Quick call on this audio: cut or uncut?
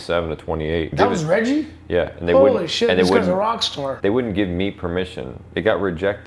cut